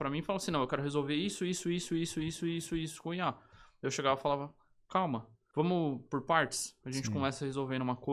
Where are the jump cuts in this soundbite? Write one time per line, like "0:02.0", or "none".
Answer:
0:05.4